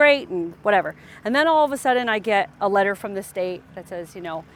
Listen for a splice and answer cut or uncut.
uncut